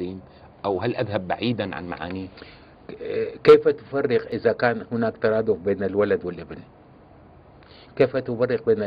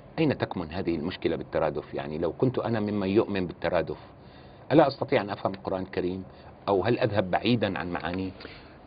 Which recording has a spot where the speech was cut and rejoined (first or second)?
first